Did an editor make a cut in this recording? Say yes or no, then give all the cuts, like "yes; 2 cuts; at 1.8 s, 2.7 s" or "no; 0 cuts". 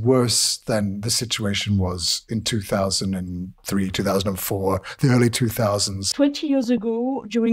yes; 1 cut; at 6.1 s